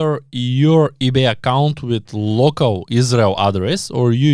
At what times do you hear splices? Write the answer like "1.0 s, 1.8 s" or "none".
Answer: none